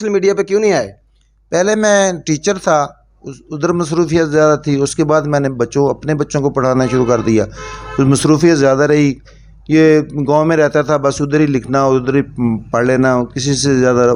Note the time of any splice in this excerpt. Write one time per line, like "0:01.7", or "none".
none